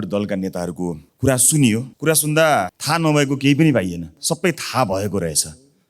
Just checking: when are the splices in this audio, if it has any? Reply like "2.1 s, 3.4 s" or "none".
1.1 s, 1.9 s, 2.8 s, 4.1 s